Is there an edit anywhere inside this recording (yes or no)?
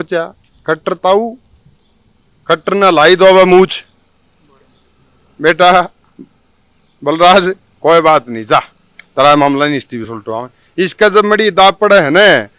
no